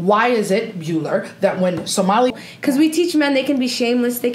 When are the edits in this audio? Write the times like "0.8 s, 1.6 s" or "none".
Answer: 2.3 s